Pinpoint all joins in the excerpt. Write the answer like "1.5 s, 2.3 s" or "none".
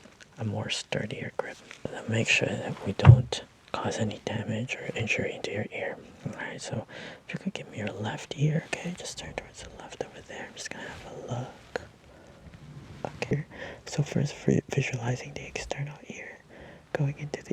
1.8 s, 13.3 s